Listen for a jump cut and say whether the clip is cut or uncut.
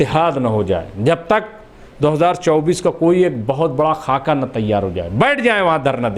uncut